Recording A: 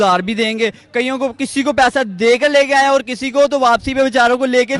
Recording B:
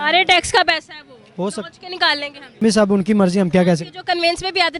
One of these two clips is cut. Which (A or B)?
B